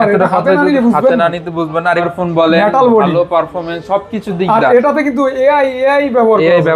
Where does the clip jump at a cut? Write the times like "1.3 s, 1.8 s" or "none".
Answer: 2.1 s